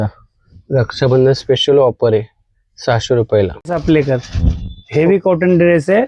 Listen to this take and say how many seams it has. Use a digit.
0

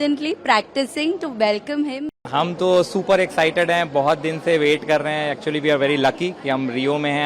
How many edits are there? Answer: 1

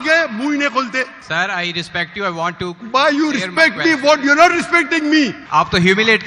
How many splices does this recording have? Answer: 2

